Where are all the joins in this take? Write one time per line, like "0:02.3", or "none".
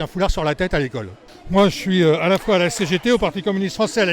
0:01.5